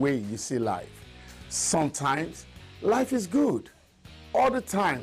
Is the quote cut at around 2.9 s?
yes; 2 cuts; at 2.9 s, 3.6 s

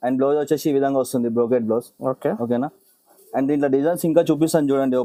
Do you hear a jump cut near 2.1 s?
no; 0 cuts

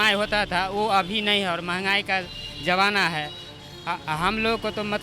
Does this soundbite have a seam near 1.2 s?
no; 1 cut; at 3.5 s

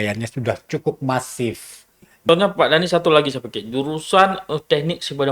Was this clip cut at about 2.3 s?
yes; 1 cut; at 2.3 s

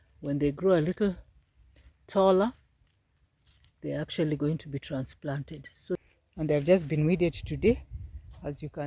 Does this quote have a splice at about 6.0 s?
yes; 1 cut; at 6.0 s

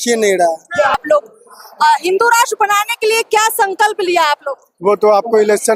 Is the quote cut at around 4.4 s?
no; 1 cut; at 0.9 s

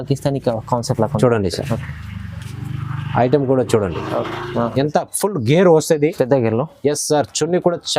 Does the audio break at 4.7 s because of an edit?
yes; 1 cut; at 4.7 s

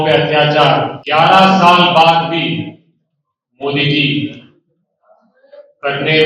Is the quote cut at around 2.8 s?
no; 1 cut; at 1.0 s

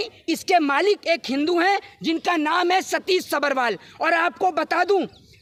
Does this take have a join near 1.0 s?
no; 0 cuts

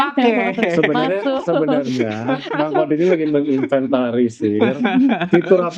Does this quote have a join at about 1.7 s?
no; 0 cuts

